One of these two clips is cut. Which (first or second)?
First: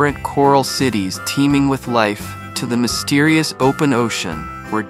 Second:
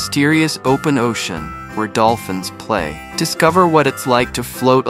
second